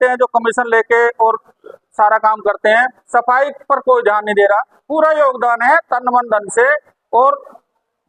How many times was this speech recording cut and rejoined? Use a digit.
1